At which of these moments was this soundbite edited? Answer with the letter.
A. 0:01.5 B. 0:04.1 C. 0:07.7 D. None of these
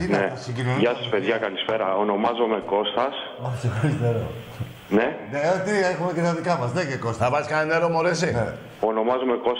B